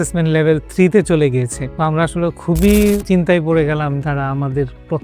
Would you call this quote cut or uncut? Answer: cut